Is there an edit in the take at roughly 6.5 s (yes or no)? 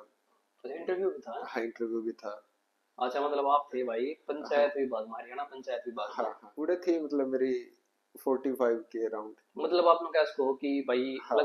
yes